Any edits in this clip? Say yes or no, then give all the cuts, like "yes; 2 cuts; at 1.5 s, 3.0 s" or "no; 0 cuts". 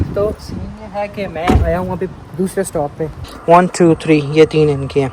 yes; 1 cut; at 3.3 s